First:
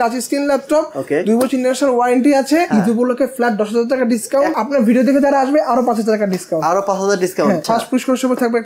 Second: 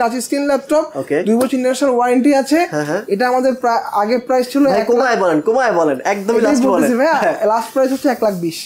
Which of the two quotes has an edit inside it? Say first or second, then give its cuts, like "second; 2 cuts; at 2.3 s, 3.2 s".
first; 3 cuts; at 2.7 s, 4.5 s, 7.6 s